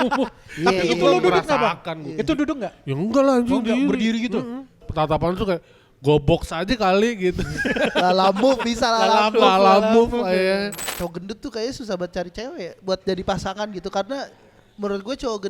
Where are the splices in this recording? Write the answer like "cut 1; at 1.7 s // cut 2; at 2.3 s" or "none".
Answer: cut 1; at 4.8 s // cut 2; at 10.8 s